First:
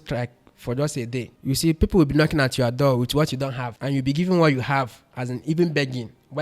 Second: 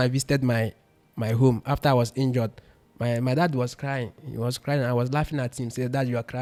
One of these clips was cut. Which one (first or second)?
first